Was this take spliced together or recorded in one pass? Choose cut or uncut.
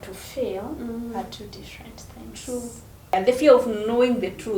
cut